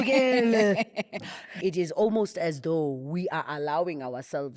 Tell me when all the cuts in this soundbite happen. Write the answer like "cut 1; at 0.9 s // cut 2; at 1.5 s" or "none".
cut 1; at 1.4 s